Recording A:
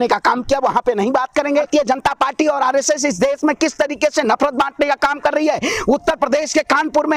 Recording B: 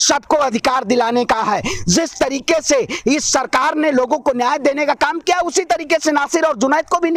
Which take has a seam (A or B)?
A